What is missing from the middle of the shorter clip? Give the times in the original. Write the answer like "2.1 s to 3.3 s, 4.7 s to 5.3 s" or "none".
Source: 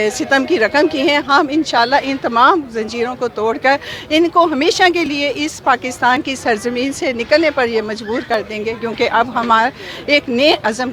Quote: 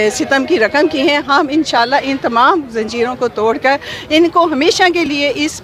none